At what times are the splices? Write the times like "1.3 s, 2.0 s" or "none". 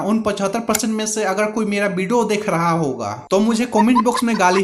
none